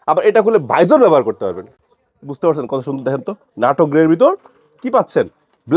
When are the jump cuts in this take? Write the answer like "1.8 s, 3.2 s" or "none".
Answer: none